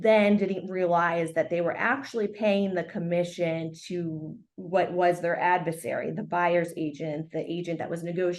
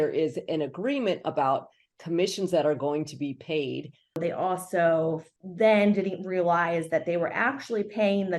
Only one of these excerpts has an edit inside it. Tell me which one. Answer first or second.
second